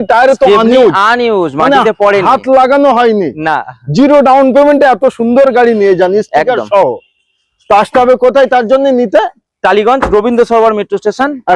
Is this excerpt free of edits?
yes; 0 cuts

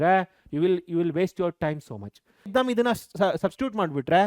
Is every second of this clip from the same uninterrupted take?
no; 1 cut; at 2.5 s

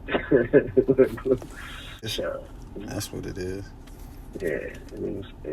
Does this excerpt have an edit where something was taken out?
yes; 1 cut; at 2.0 s

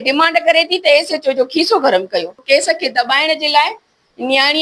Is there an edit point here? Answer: yes; 1 cut; at 2.4 s

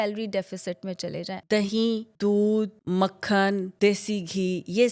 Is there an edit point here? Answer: yes; 4 cuts; at 1.3 s, 2.1 s, 2.8 s, 3.7 s

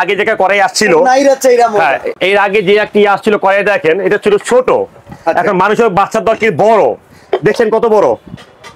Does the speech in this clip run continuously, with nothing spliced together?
yes; 0 cuts

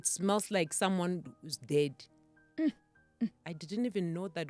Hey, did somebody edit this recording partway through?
yes; 1 cut; at 3.5 s

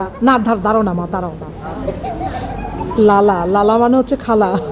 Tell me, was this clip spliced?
yes; 1 cut; at 1.5 s

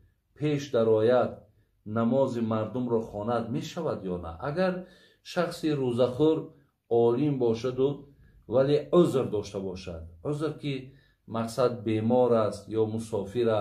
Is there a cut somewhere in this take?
no; 0 cuts

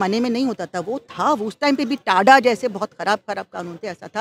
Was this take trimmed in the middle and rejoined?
no; 0 cuts

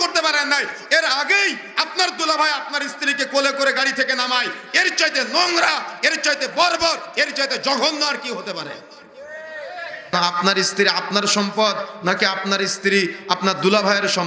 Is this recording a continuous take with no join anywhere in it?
no; 1 cut; at 10.1 s

